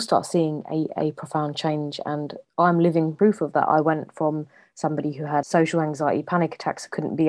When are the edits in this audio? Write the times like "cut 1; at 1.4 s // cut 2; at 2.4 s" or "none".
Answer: cut 1; at 3.1 s // cut 2; at 5.4 s